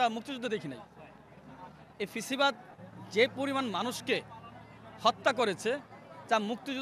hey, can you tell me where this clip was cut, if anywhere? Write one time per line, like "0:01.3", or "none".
none